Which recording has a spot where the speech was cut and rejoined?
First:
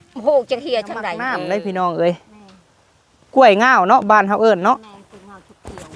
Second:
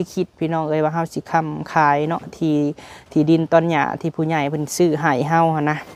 first; 1 cut; at 1.2 s

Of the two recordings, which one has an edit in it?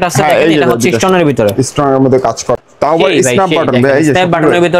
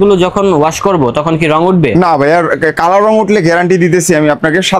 first; 1 cut; at 2.6 s

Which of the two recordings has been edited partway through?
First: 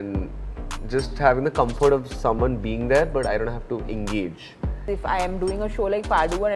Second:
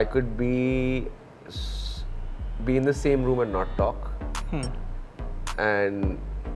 first; 1 cut; at 4.8 s

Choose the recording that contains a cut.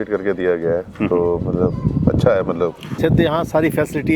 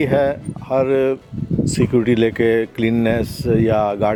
first; 1 cut; at 3.0 s

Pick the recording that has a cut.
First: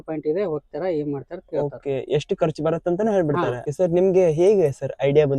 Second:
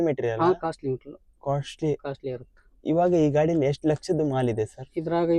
first; 1 cut; at 3.7 s

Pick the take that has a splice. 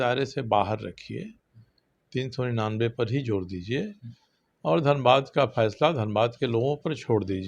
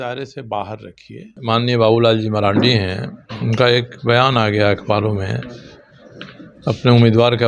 second; 1 cut; at 1.3 s

